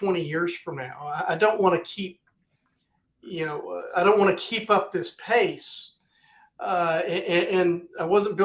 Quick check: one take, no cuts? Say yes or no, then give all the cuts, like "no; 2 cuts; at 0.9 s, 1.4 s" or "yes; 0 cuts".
yes; 0 cuts